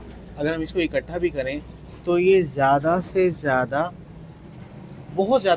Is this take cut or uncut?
uncut